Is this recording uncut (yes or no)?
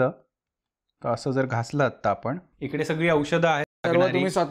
no